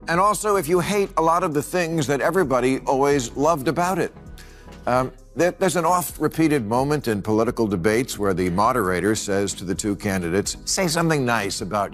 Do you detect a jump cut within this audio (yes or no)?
no